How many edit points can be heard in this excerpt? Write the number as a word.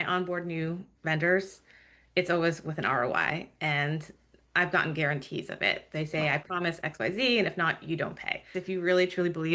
one